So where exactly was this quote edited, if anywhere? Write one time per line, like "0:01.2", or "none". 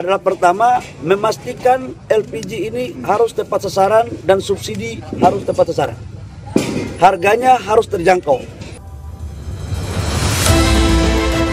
none